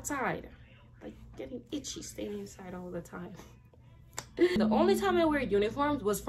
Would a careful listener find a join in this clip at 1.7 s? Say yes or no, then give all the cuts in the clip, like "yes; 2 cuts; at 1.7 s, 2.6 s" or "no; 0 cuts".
no; 1 cut; at 4.6 s